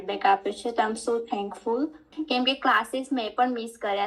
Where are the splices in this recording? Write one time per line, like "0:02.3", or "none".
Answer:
0:02.1